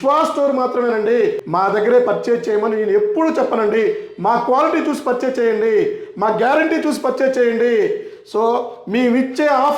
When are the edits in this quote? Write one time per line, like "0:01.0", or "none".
0:01.4